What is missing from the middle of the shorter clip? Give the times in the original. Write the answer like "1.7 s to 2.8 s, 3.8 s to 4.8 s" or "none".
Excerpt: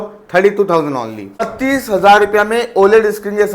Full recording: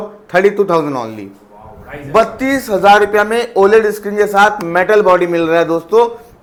1.5 s to 2.3 s